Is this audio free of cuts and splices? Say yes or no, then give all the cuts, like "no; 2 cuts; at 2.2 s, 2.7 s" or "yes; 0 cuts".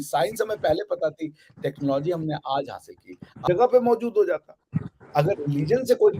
no; 1 cut; at 3.4 s